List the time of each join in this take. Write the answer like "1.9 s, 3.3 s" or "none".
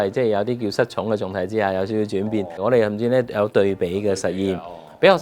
2.6 s

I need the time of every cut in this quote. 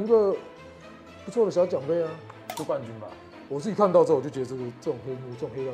3.3 s

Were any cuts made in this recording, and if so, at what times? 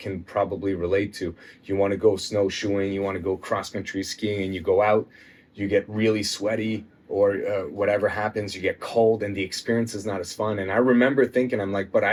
none

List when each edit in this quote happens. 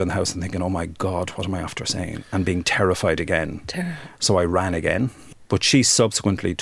5.2 s

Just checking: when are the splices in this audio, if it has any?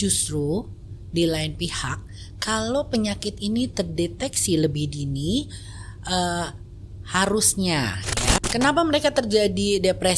8.4 s

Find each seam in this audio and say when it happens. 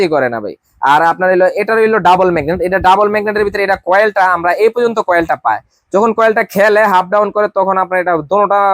none

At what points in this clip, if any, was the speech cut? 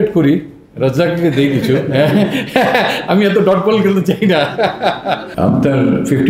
5.3 s

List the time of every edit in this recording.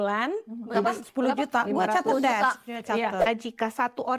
3.2 s

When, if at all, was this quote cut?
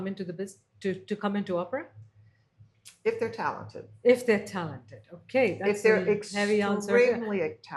none

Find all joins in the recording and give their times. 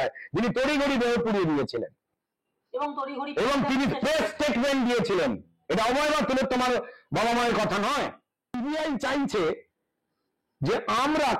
8.4 s

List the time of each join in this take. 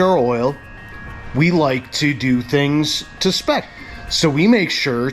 3.8 s

